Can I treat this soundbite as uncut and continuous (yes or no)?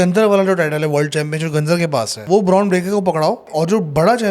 no